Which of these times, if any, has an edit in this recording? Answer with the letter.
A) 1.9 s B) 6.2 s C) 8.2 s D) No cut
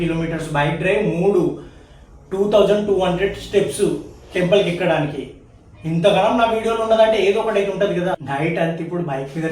C